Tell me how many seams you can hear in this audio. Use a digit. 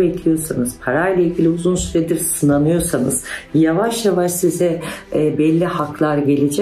0